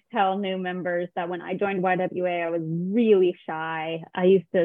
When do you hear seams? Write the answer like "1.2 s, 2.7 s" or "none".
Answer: none